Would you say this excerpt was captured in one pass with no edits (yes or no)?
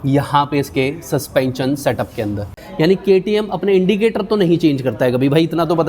no